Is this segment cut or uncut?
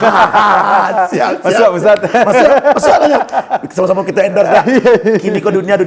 uncut